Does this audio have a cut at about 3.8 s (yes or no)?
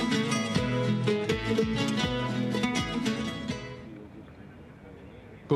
yes